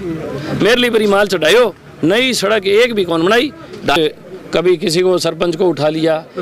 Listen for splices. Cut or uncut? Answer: cut